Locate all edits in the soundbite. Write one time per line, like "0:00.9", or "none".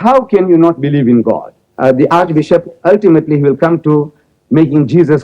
0:01.6